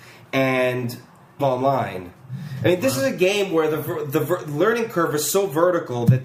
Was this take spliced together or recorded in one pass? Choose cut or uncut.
uncut